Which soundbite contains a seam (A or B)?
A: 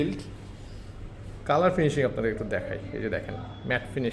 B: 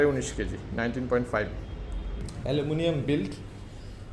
B